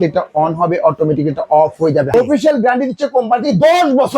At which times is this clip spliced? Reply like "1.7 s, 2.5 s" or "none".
2.1 s